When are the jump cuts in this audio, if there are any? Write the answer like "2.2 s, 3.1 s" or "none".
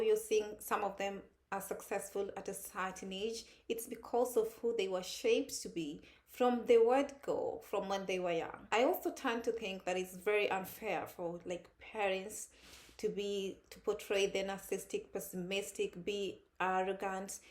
8.7 s